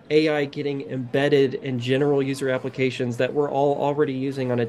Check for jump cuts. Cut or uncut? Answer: uncut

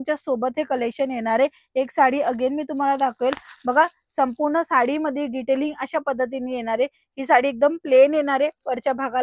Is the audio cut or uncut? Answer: uncut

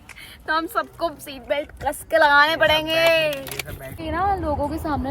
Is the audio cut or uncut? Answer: cut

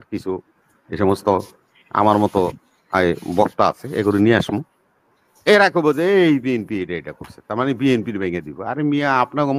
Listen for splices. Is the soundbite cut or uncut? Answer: uncut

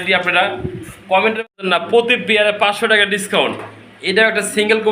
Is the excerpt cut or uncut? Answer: cut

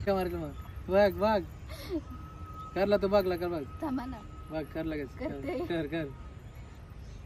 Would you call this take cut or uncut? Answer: uncut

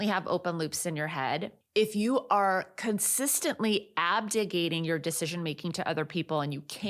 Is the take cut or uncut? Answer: cut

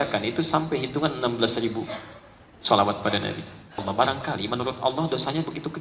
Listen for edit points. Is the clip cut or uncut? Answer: cut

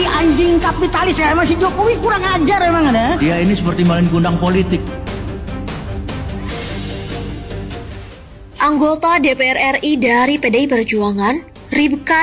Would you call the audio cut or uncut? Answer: cut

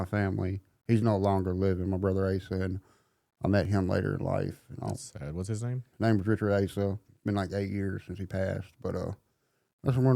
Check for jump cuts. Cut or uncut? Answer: cut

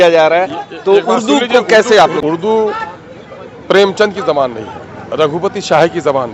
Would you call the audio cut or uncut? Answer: cut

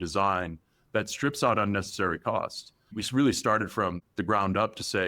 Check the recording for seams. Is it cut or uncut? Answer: cut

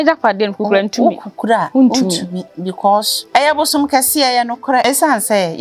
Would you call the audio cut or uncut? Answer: cut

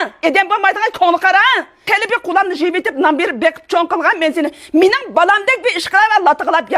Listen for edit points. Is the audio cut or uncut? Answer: cut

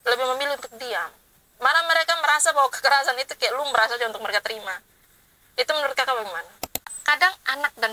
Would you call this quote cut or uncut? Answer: cut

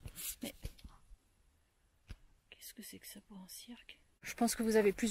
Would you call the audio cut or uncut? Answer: cut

